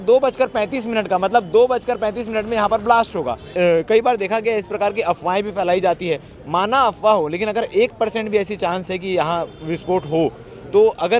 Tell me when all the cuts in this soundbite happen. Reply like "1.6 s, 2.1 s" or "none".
3.5 s